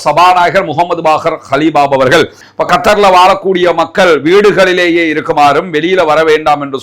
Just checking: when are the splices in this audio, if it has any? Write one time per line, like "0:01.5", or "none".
0:02.4